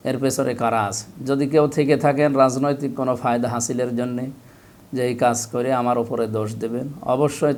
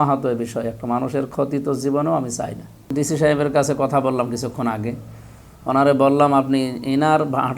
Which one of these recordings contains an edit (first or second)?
second